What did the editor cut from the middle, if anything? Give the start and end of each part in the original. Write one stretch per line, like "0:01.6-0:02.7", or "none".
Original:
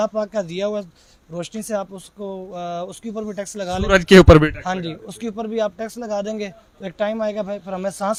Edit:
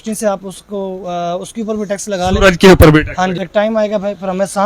0:04.9-0:06.9